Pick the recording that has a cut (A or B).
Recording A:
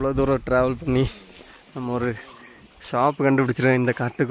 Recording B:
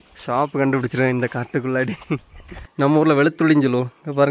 B